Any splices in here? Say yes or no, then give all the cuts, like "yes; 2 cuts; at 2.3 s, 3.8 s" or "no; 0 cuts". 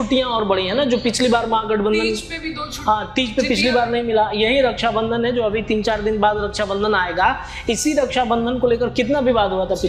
no; 0 cuts